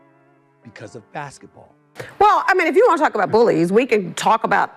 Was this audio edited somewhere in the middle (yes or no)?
yes